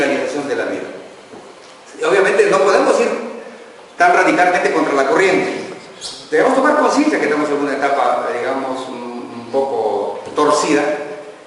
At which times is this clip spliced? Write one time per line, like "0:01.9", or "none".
0:01.6